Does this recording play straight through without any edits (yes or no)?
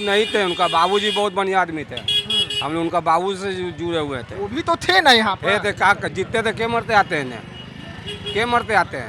yes